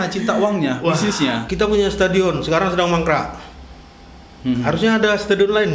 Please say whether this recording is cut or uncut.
cut